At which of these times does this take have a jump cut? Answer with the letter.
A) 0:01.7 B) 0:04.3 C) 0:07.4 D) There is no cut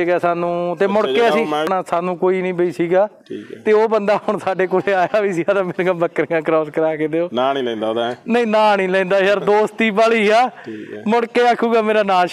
A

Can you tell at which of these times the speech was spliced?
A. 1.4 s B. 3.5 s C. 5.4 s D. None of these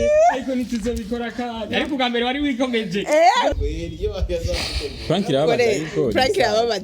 B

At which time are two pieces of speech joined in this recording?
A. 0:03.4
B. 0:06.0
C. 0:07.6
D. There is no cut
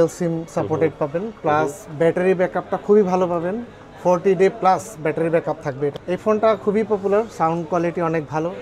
B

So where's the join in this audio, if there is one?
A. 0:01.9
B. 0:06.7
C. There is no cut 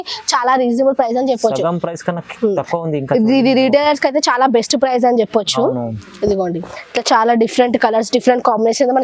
B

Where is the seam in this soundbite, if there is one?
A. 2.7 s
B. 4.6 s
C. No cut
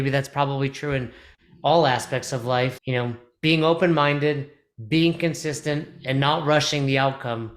A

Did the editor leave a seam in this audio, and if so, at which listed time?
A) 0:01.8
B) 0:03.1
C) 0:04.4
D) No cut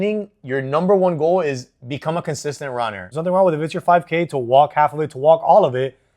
B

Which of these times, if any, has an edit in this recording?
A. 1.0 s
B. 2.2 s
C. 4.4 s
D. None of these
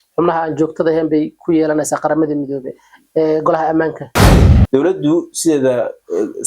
C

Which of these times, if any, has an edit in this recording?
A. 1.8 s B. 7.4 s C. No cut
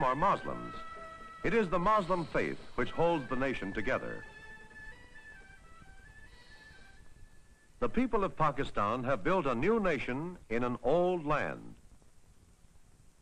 A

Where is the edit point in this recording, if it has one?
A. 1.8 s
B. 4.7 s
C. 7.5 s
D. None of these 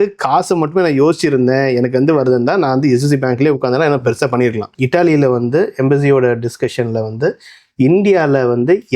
B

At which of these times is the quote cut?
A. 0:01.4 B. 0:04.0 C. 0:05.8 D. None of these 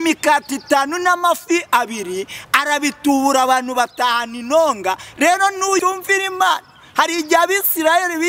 C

